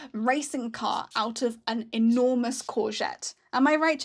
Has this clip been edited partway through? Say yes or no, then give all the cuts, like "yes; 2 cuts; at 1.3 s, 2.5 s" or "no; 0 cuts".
no; 0 cuts